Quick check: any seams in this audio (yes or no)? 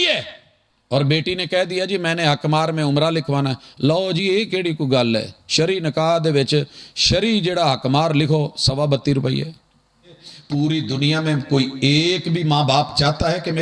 yes